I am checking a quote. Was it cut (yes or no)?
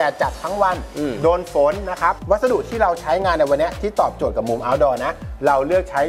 no